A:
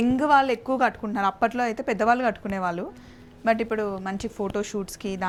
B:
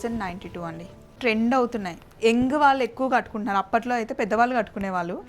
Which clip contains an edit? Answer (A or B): B